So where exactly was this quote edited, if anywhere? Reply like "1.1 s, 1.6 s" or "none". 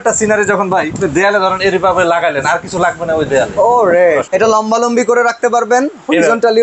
0.9 s, 4.2 s